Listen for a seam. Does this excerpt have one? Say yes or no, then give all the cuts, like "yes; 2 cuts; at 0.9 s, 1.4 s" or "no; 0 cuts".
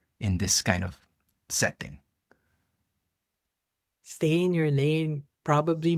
no; 0 cuts